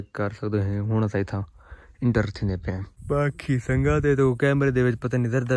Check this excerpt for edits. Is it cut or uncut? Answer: cut